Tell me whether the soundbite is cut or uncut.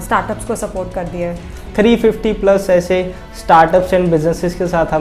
cut